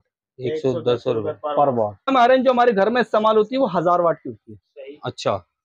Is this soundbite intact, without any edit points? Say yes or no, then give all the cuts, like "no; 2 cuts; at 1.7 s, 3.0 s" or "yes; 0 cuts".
no; 1 cut; at 2.1 s